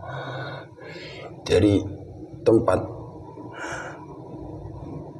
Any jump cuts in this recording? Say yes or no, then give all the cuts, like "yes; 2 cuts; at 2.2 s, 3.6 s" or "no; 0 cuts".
no; 0 cuts